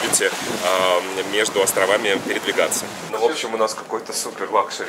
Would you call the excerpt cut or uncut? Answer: cut